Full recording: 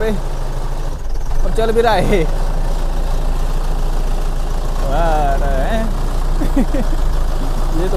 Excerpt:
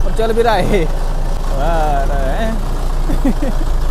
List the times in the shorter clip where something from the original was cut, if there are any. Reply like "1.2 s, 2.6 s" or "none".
1.4 s